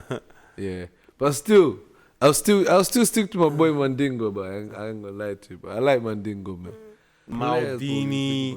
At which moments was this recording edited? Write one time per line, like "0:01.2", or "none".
0:07.3